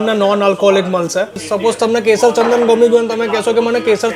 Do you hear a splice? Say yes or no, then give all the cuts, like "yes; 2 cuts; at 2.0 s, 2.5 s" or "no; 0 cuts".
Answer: yes; 1 cut; at 1.5 s